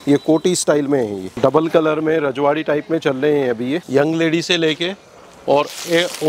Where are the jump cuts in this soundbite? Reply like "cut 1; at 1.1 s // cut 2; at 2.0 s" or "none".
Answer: cut 1; at 1.2 s // cut 2; at 3.8 s